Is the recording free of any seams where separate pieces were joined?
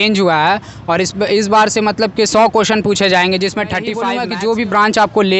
no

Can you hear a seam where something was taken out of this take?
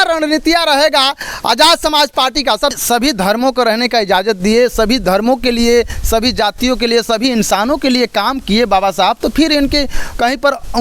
yes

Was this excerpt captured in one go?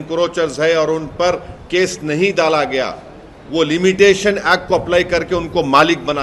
yes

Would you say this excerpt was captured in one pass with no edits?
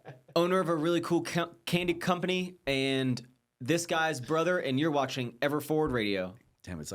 yes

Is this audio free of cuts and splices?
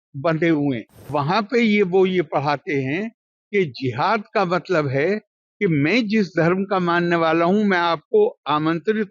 no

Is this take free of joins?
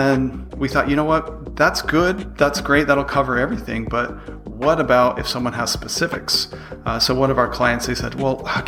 yes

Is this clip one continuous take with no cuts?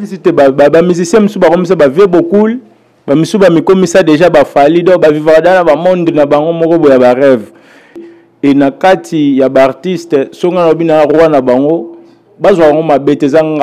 no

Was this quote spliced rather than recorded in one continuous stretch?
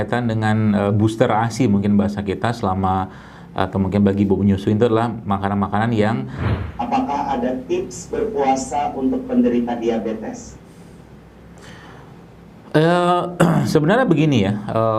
yes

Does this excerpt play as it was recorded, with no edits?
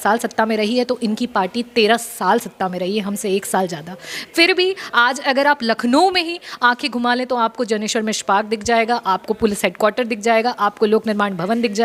yes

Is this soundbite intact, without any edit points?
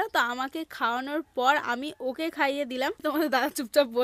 no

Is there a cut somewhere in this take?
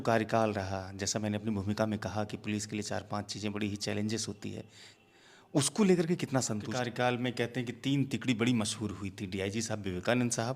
yes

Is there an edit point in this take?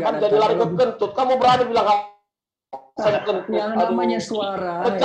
yes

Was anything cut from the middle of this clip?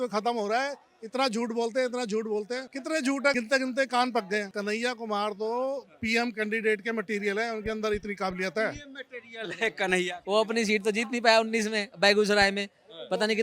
yes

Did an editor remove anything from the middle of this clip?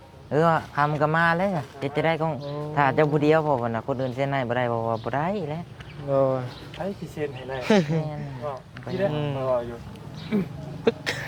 no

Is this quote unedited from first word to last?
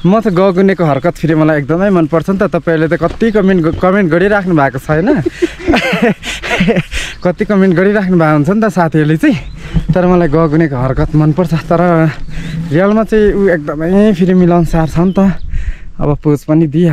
yes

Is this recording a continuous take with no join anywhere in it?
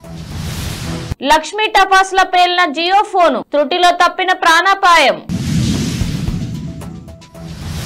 yes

